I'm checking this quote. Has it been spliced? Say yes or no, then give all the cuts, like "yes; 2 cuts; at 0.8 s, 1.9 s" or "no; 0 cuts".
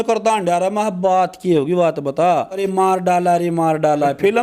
yes; 1 cut; at 2.6 s